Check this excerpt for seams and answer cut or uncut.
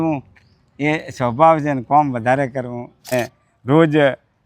cut